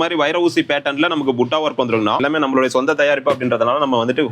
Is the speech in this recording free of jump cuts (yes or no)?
no